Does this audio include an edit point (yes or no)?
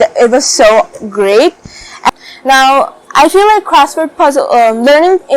yes